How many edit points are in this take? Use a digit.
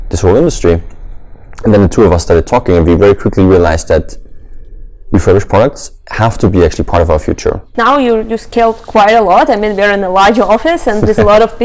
1